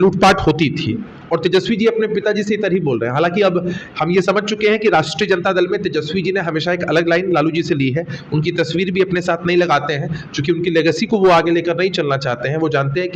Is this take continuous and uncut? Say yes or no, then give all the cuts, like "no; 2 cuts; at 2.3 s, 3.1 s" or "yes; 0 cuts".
yes; 0 cuts